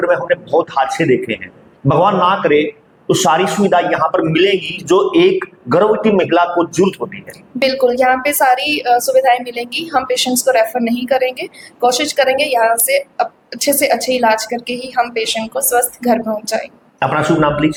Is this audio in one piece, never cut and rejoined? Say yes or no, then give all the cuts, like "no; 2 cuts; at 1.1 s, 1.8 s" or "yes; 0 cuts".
yes; 0 cuts